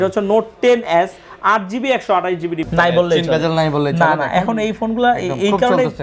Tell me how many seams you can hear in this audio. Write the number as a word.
one